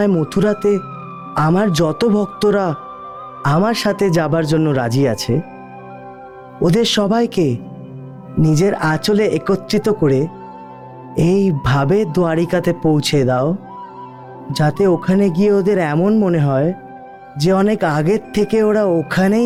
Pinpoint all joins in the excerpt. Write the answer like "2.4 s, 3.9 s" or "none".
none

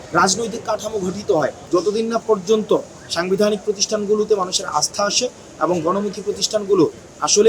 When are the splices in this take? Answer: 1.6 s

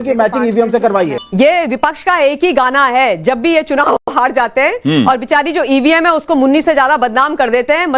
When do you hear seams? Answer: 1.2 s

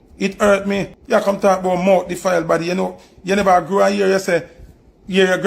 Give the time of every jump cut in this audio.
0.9 s

